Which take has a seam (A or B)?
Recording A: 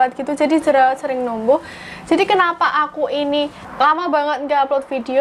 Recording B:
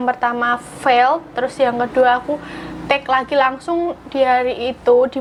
A